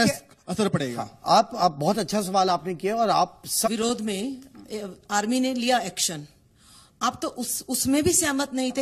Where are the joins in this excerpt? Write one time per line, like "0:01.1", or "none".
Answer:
0:03.7

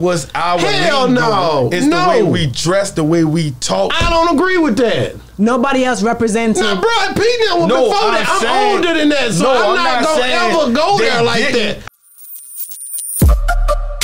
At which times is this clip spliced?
0:11.8

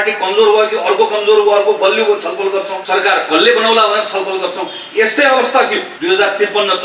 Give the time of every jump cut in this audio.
0:02.8
0:05.9

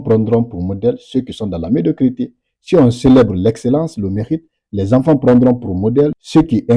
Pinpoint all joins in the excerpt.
none

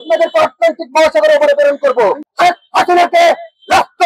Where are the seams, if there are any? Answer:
0:02.2

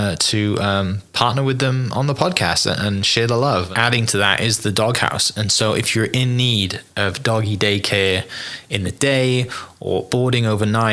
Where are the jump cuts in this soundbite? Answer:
0:03.7

